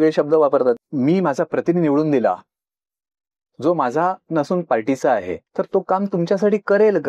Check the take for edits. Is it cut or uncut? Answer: cut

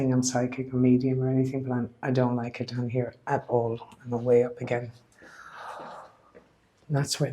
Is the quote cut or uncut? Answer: uncut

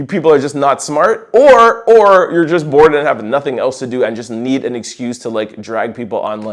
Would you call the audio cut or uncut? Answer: uncut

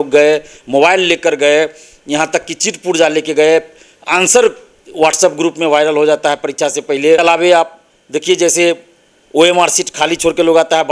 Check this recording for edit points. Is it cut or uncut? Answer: cut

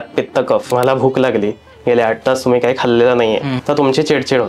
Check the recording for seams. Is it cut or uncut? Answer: cut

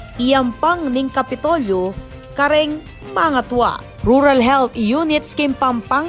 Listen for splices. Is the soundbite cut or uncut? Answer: uncut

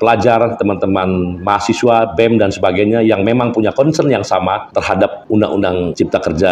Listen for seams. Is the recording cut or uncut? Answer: uncut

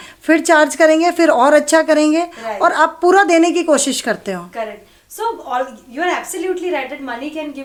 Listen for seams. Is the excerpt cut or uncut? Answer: uncut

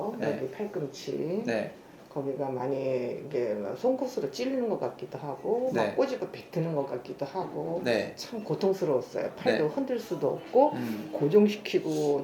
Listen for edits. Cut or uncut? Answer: uncut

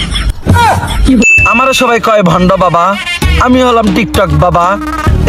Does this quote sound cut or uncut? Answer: cut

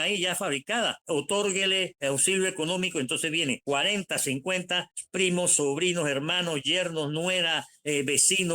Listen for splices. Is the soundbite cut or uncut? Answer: cut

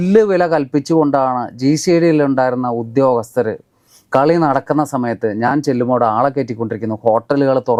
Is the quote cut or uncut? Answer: uncut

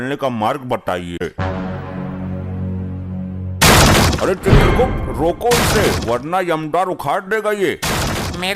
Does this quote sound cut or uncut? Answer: cut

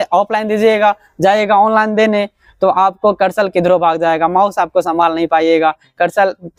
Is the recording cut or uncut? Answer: uncut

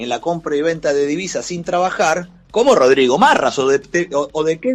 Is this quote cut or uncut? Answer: uncut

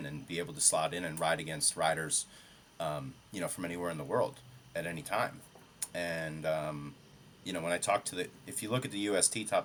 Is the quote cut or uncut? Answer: uncut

